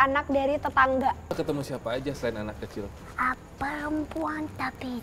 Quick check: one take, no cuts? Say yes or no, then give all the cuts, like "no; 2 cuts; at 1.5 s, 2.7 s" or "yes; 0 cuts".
no; 1 cut; at 1.3 s